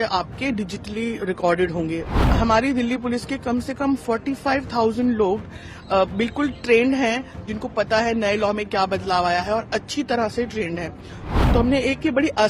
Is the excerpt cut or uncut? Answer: cut